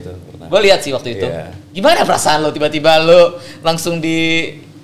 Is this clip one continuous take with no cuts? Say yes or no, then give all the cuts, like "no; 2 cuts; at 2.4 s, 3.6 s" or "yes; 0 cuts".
yes; 0 cuts